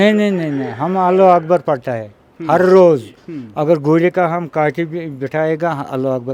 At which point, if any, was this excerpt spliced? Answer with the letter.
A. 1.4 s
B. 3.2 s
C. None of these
C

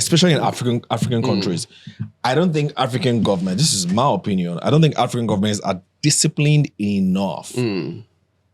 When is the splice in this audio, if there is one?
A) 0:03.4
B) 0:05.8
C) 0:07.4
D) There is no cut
D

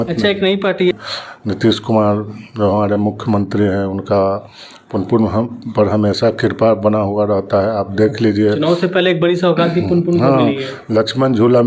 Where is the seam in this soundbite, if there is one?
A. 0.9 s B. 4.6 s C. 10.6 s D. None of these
A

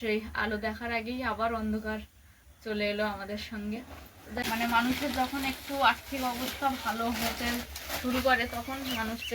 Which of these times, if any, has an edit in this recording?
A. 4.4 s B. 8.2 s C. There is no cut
A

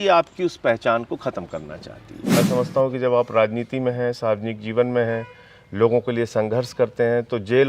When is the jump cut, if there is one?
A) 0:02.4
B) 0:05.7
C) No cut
A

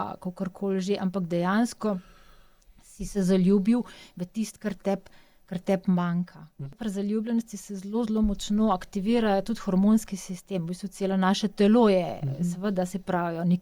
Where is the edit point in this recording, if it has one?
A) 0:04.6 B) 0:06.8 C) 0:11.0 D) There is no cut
B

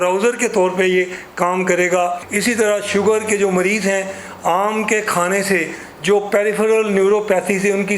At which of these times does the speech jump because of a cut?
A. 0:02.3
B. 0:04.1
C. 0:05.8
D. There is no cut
A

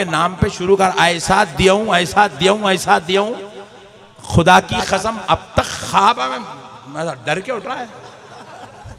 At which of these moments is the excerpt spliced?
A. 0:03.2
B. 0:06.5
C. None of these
C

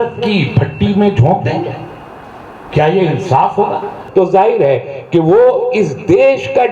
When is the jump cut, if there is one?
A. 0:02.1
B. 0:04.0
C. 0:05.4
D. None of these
B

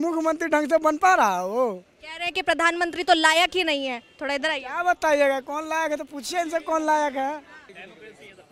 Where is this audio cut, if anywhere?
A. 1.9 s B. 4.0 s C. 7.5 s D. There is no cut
C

